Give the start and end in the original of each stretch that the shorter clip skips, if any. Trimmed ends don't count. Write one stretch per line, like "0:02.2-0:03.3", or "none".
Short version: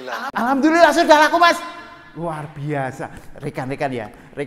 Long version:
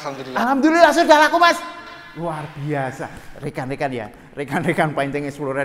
none